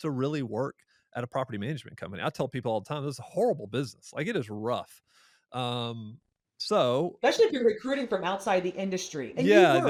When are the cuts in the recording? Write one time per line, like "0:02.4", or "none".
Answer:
none